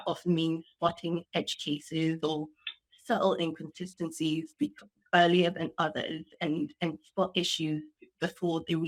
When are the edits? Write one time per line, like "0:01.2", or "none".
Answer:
none